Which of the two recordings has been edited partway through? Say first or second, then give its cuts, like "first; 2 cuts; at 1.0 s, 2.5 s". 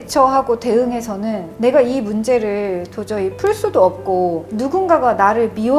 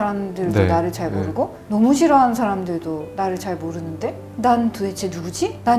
first; 1 cut; at 4.5 s